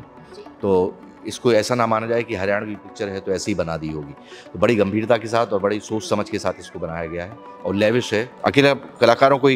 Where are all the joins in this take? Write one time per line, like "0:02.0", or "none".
0:08.3